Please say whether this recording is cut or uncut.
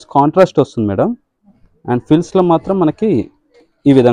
uncut